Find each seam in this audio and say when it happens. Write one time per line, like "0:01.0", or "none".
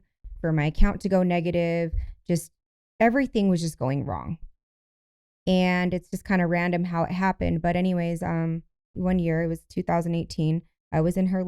0:09.0